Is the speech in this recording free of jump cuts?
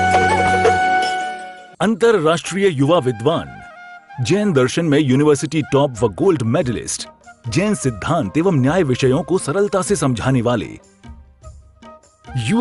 yes; 0 cuts

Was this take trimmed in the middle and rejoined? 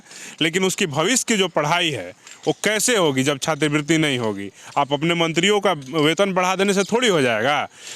no; 0 cuts

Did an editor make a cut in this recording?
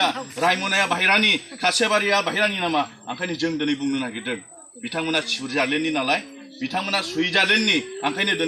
no; 0 cuts

